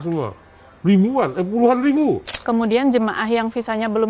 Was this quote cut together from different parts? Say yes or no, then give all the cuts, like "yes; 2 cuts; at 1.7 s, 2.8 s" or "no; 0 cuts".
yes; 1 cut; at 2.3 s